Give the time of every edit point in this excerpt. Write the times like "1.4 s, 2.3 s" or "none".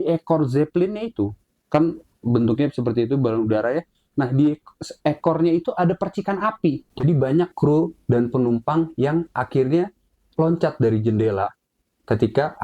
6.9 s

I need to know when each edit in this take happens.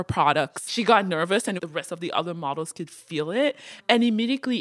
1.6 s

